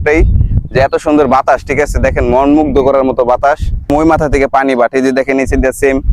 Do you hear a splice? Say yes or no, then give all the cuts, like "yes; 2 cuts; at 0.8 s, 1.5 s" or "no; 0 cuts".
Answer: yes; 1 cut; at 3.9 s